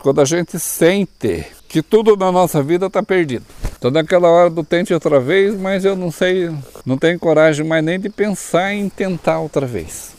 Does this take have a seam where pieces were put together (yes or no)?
no